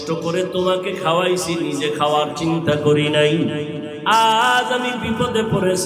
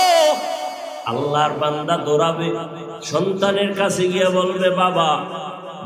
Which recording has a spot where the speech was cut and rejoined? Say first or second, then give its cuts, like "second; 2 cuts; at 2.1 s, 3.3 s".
second; 1 cut; at 0.9 s